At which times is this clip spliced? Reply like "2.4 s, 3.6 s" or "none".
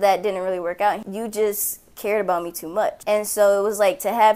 1.0 s, 3.0 s